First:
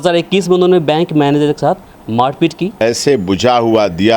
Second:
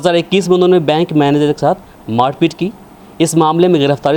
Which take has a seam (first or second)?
first